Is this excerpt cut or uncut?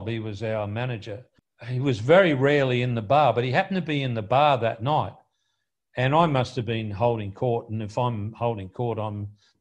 cut